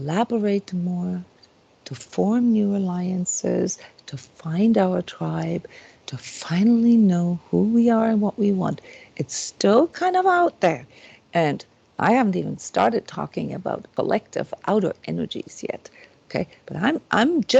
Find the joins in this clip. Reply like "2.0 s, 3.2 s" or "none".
13.9 s